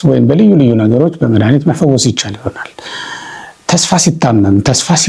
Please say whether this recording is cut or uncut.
uncut